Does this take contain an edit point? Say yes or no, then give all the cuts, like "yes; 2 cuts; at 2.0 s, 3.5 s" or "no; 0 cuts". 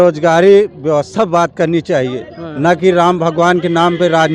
no; 0 cuts